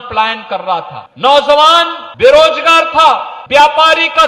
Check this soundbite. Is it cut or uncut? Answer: cut